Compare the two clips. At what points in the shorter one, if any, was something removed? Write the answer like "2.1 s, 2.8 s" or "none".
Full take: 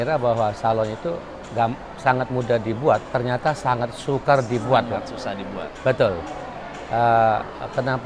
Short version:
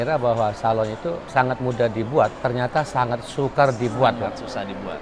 1.2 s